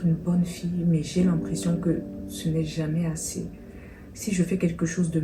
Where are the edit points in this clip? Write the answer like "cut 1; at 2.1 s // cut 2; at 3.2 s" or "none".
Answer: none